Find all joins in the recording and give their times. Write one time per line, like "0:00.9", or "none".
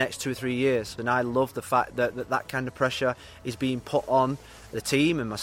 0:00.9

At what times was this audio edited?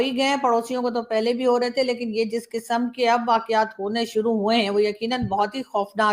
none

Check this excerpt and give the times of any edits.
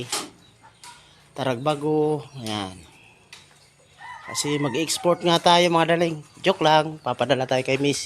none

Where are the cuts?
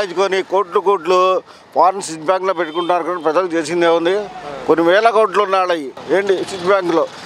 0:05.9

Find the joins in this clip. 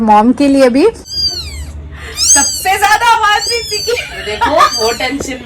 0:01.0

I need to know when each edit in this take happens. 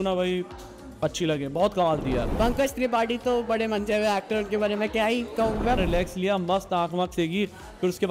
0:02.3
0:05.8

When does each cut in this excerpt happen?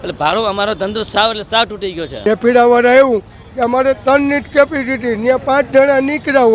0:02.2

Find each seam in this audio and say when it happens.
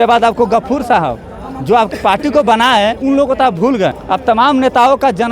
0:01.9
0:04.0

